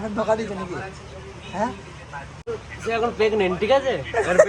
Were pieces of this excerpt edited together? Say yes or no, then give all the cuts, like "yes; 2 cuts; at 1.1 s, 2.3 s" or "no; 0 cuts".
yes; 1 cut; at 2.5 s